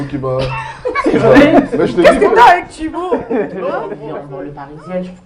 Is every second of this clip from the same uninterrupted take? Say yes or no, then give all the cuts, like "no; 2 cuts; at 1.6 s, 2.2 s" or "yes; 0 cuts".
no; 1 cut; at 4.1 s